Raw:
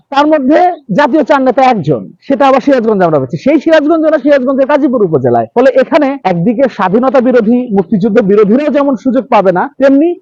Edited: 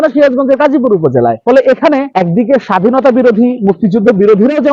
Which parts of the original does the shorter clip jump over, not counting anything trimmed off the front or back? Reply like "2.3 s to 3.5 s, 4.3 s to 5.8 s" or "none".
none